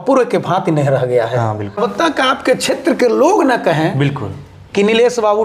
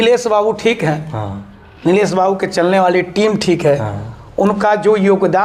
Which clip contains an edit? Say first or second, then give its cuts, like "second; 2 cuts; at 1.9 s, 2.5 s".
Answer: first; 1 cut; at 1.8 s